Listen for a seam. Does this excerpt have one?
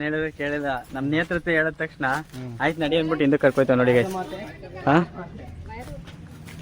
no; 0 cuts

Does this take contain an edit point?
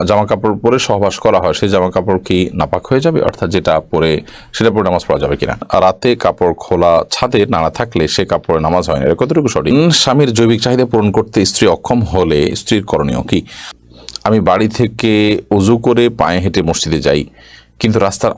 yes; 3 cuts; at 5.6 s, 9.7 s, 13.8 s

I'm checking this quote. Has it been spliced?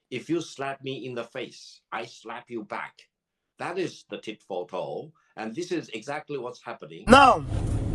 yes; 1 cut; at 6.9 s

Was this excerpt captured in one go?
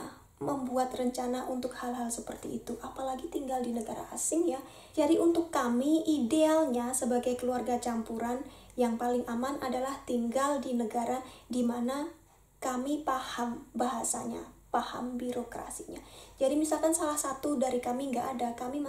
yes; 0 cuts

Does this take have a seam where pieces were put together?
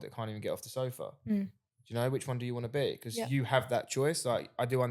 no; 0 cuts

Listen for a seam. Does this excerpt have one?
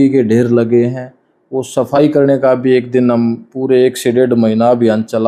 no; 0 cuts

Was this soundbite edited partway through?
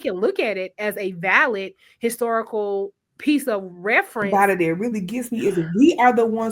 yes; 1 cut; at 4.3 s

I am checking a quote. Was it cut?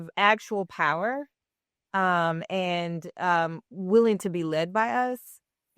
no; 0 cuts

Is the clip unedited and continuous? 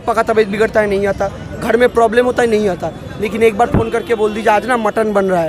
yes; 0 cuts

